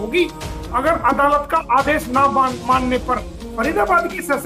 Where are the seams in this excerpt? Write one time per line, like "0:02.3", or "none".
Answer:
0:03.4